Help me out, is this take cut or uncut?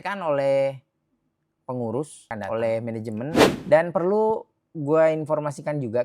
cut